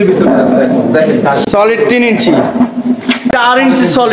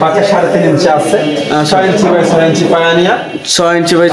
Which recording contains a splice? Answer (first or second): first